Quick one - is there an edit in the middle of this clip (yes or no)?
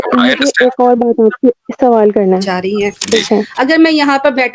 yes